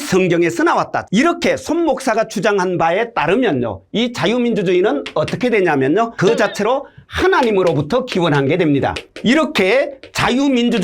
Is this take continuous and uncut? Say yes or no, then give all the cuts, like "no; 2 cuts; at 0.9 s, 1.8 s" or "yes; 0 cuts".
no; 2 cuts; at 1.1 s, 9.0 s